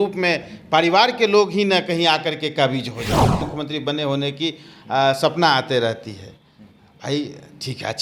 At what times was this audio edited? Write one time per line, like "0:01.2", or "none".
0:03.5